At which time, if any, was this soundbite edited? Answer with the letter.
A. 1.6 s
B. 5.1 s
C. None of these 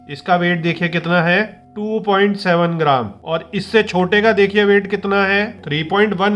C